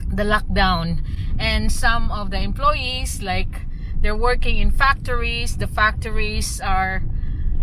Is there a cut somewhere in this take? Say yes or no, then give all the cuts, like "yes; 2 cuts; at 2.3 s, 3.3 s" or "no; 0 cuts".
no; 0 cuts